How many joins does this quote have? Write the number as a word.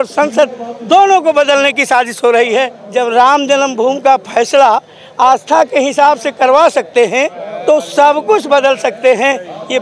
two